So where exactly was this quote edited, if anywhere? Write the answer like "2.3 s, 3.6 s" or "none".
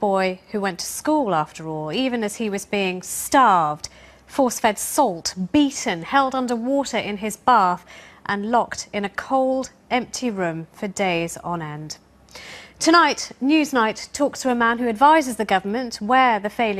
13.0 s